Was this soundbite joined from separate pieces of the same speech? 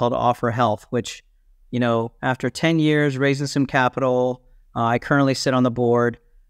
no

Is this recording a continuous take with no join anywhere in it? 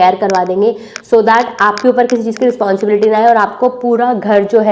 yes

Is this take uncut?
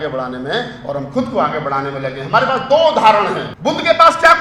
no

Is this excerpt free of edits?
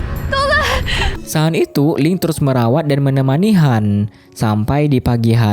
no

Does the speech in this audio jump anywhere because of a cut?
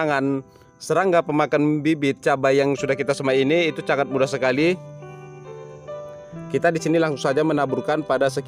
yes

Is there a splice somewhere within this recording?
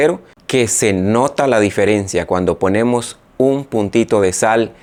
no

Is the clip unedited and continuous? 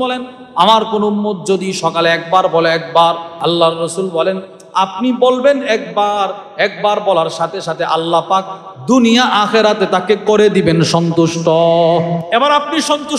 no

